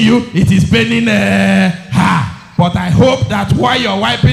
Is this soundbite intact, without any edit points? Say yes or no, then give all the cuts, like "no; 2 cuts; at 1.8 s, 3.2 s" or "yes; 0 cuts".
yes; 0 cuts